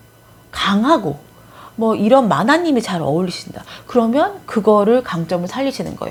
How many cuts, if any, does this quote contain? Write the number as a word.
zero